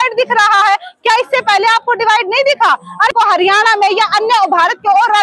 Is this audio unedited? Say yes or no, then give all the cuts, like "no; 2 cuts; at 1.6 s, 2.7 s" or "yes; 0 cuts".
no; 1 cut; at 3.1 s